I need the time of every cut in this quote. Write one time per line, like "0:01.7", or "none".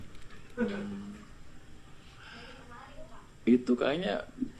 none